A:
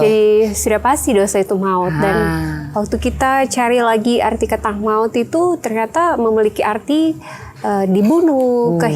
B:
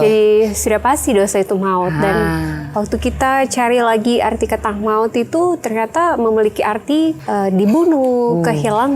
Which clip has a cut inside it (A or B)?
B